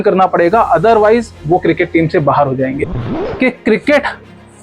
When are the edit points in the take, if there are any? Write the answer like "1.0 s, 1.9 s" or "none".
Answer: 2.8 s